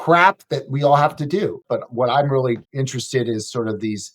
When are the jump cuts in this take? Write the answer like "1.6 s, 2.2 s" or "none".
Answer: 1.6 s, 2.7 s